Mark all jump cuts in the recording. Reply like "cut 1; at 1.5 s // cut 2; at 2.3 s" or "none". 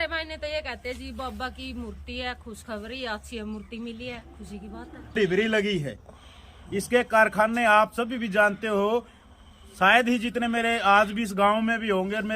cut 1; at 5.1 s